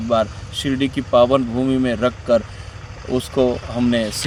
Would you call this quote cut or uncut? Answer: uncut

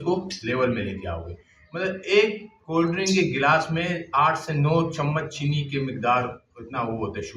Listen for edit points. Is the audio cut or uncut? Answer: uncut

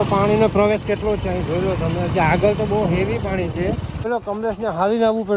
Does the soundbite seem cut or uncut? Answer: cut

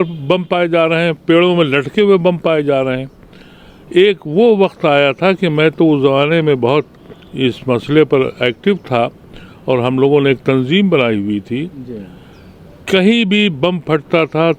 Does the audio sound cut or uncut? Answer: uncut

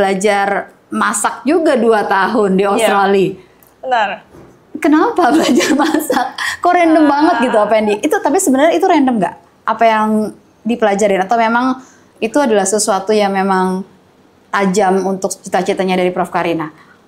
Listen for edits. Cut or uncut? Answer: uncut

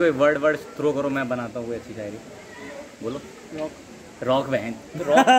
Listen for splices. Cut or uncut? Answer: uncut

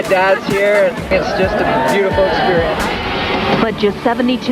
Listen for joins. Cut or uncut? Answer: cut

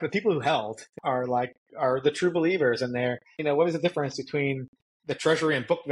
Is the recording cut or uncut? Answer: cut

